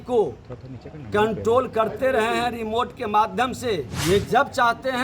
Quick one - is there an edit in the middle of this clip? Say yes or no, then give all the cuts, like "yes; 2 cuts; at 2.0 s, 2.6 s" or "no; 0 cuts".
yes; 1 cut; at 3.9 s